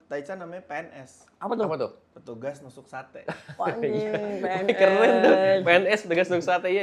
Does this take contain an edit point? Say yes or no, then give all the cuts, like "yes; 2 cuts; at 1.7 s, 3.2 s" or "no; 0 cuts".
no; 0 cuts